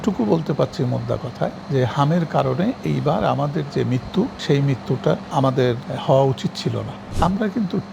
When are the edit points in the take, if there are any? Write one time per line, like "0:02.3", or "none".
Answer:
0:01.6
0:04.4
0:05.7
0:07.0